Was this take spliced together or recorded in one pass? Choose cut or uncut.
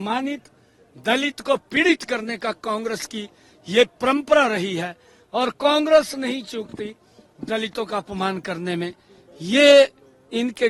uncut